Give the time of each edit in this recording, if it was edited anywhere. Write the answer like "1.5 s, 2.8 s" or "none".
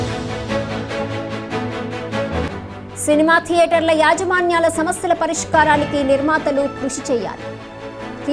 1.8 s